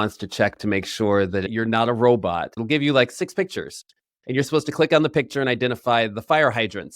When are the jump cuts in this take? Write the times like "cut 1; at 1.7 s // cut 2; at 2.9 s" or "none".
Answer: cut 1; at 1.5 s // cut 2; at 2.6 s // cut 3; at 4.1 s